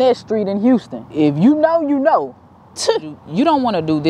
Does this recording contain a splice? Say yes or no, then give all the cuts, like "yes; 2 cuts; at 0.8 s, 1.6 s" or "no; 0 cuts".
yes; 2 cuts; at 1.1 s, 3.3 s